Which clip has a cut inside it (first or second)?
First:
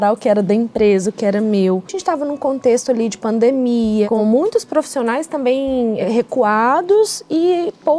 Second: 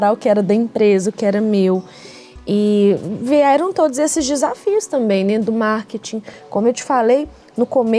first